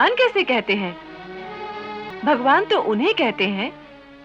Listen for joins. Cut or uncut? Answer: uncut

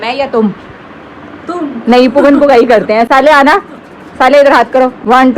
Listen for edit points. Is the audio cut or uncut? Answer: uncut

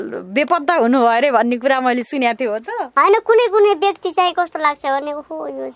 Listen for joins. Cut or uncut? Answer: cut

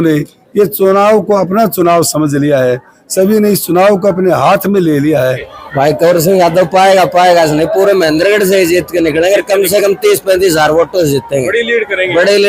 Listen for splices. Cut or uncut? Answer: cut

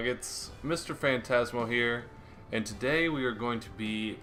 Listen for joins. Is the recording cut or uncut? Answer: uncut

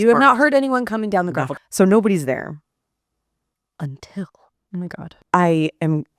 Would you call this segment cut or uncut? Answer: cut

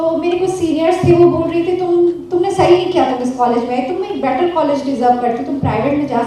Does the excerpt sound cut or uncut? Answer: uncut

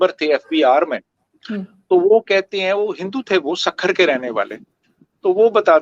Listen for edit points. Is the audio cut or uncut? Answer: uncut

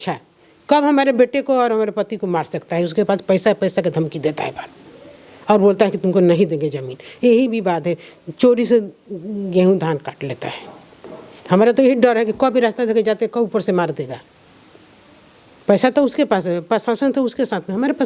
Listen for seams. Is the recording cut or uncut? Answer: uncut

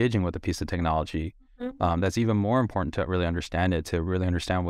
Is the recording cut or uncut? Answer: uncut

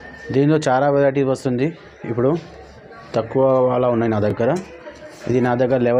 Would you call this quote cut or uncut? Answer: uncut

